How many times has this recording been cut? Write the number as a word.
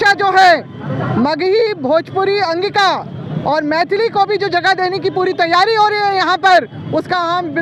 zero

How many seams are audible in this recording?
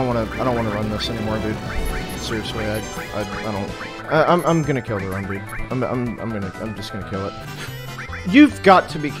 two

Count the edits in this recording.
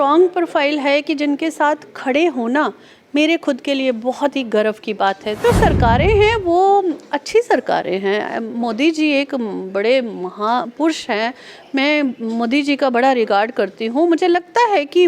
one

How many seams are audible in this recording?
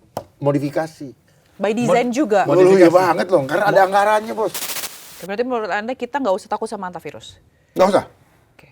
one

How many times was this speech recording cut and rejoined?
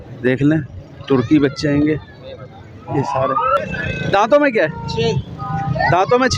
one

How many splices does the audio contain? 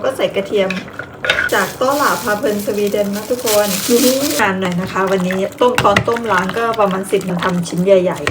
three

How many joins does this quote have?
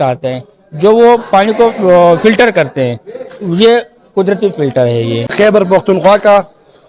one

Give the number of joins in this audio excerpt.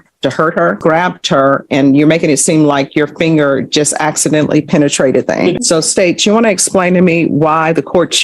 two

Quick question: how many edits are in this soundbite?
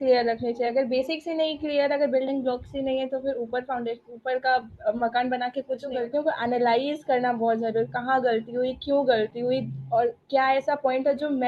one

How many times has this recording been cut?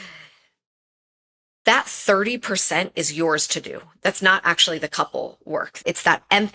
zero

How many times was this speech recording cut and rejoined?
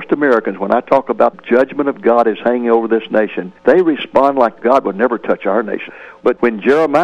three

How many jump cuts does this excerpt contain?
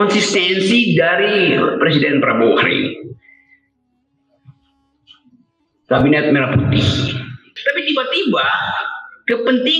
one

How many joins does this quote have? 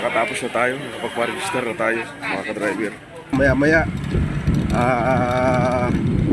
one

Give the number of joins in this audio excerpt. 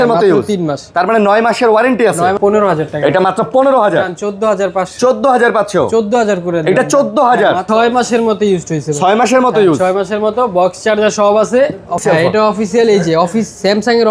three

